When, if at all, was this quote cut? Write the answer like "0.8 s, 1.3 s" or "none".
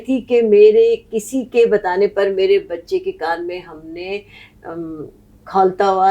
none